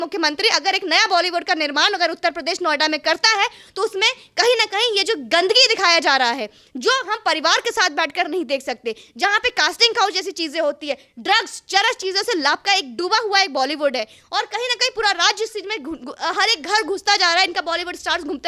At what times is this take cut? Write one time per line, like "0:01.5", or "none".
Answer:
none